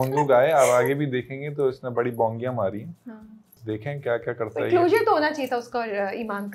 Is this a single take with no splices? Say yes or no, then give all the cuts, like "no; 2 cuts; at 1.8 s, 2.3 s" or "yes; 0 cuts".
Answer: yes; 0 cuts